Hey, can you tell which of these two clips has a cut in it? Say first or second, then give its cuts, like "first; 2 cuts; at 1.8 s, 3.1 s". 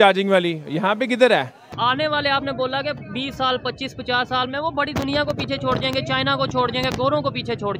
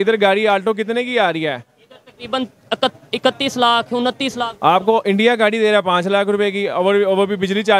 first; 1 cut; at 1.7 s